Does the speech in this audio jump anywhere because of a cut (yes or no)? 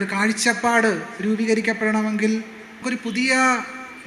yes